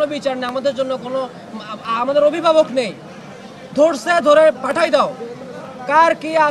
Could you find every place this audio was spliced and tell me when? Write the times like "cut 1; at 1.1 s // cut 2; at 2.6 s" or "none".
none